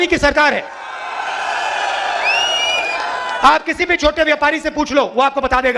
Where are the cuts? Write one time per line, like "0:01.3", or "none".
none